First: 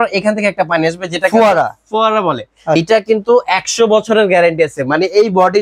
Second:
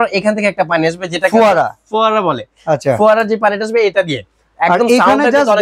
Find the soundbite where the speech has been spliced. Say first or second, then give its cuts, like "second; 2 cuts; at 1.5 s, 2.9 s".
first; 1 cut; at 2.8 s